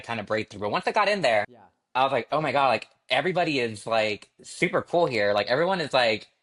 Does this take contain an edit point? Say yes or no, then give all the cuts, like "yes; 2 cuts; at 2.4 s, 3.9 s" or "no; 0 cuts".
no; 0 cuts